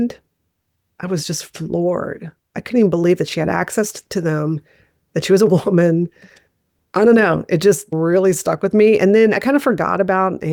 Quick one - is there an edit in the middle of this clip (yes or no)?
no